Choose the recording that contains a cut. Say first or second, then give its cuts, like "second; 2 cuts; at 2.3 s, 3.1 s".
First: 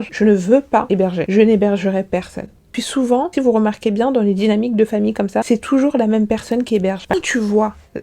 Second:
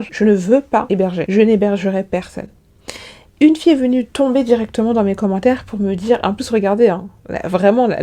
first; 2 cuts; at 2.8 s, 7.1 s